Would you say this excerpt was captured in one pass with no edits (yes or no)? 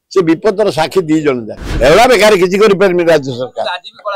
no